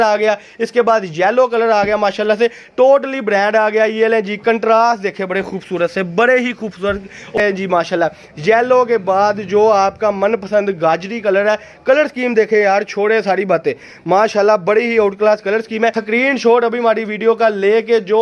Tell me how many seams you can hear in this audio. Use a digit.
2